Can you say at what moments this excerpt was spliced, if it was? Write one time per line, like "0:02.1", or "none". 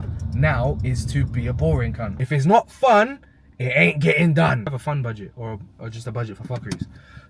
0:02.1
0:04.8